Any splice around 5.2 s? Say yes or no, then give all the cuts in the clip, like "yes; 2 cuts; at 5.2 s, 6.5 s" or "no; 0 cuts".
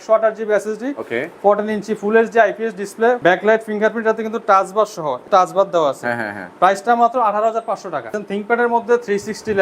yes; 3 cuts; at 3.2 s, 5.2 s, 8.2 s